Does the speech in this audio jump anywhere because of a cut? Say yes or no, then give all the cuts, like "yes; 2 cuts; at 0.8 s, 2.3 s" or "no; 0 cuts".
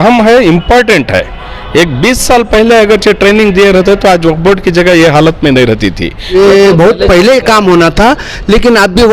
yes; 1 cut; at 6.3 s